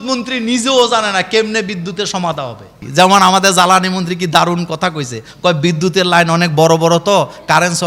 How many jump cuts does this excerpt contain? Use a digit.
1